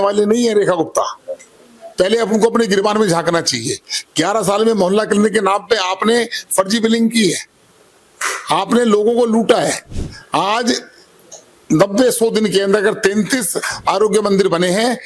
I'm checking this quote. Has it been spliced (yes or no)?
no